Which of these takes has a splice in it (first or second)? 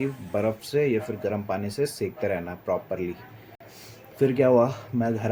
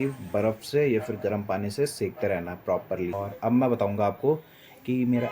second